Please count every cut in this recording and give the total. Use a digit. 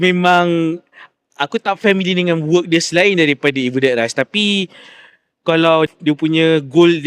1